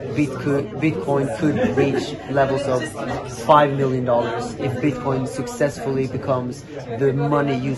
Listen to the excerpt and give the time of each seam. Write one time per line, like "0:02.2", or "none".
none